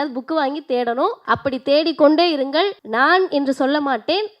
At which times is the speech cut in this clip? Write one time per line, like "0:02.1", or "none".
0:01.2
0:02.8